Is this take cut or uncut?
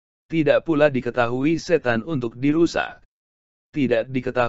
uncut